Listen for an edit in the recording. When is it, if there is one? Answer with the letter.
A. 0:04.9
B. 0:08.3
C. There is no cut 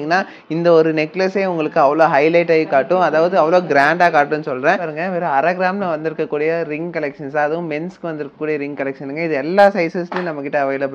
A